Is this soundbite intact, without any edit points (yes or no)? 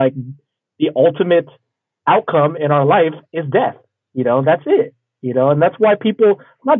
yes